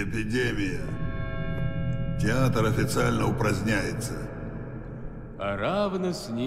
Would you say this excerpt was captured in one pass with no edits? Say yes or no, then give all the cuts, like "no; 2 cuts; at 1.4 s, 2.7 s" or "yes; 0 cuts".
yes; 0 cuts